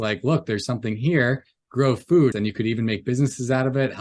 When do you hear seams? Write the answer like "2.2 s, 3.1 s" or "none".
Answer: 2.4 s